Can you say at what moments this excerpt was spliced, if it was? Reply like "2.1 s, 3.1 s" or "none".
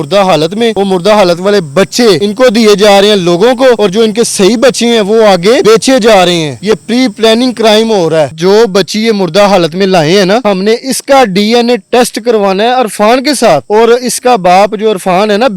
8.3 s